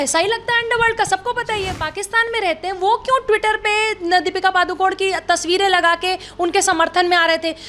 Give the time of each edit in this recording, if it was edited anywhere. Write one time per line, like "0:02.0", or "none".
0:01.8